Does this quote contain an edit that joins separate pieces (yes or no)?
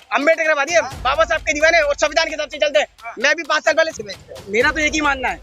yes